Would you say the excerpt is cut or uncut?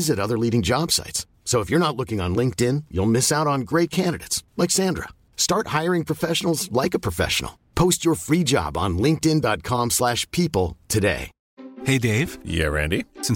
uncut